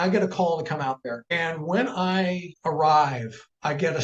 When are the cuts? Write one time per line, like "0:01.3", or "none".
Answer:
0:01.2
0:02.5

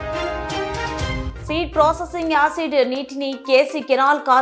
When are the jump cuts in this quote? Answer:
0:01.3

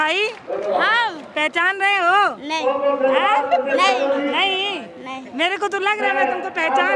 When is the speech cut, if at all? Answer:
none

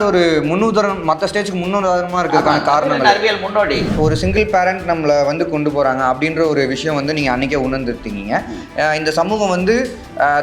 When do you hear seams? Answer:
0:03.9

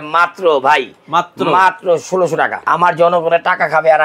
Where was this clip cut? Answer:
0:02.6

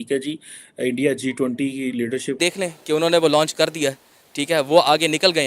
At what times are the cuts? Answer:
0:02.4

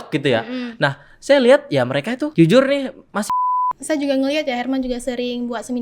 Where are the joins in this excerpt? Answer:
0:02.3
0:03.3

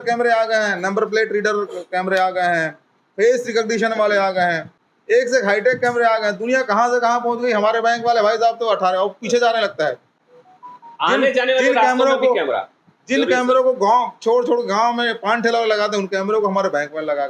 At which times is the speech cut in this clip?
none

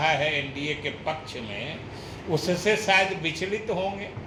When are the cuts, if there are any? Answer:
none

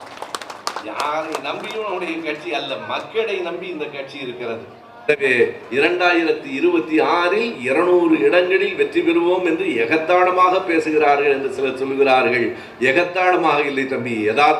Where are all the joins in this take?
0:05.1

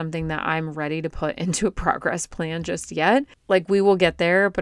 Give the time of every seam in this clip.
0:03.4

